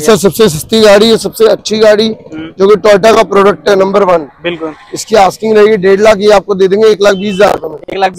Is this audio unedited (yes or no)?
yes